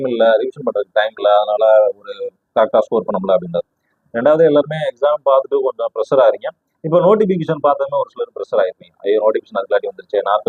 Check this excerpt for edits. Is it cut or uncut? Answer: uncut